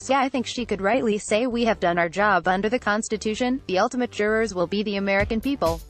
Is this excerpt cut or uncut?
uncut